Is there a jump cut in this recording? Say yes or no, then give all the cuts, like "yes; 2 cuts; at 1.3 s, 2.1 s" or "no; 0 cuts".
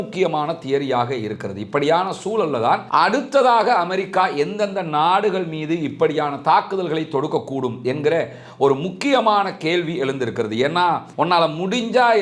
yes; 2 cuts; at 2.8 s, 11.1 s